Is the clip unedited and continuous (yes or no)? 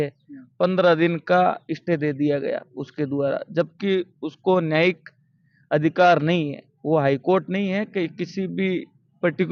yes